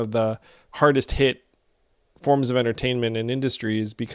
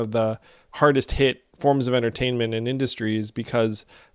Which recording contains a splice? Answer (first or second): second